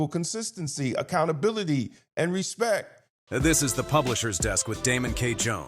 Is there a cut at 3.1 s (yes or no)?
yes